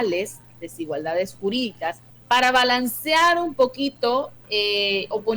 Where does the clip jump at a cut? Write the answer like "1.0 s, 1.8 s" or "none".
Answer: 2.1 s